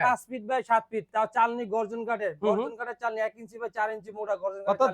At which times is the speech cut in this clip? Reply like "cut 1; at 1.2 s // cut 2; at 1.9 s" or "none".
none